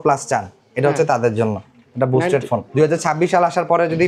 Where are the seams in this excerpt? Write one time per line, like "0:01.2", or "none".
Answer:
0:02.7